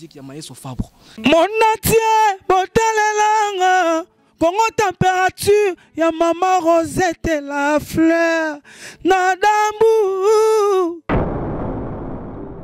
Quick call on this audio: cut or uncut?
cut